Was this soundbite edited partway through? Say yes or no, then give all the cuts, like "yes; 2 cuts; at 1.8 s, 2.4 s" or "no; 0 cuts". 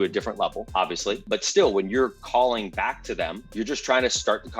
yes; 2 cuts; at 1.2 s, 3.4 s